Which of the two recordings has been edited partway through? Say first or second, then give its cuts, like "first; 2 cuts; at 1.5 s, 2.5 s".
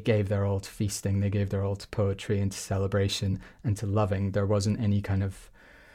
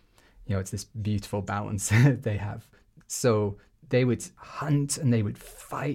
second; 2 cuts; at 2.7 s, 4.3 s